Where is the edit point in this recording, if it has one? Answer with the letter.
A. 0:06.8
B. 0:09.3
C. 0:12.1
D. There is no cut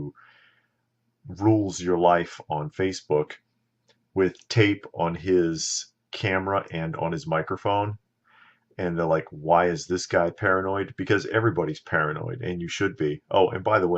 B